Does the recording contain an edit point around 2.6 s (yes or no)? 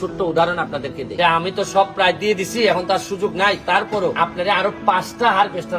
no